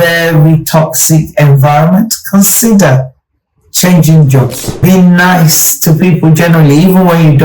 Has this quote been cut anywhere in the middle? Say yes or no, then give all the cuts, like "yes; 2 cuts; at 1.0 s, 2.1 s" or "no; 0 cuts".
yes; 1 cut; at 4.6 s